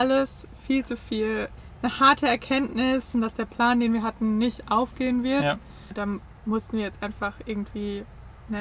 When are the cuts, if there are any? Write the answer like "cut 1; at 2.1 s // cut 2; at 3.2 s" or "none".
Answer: cut 1; at 1.6 s // cut 2; at 3.1 s // cut 3; at 5.9 s